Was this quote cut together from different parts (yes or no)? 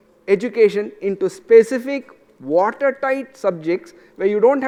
no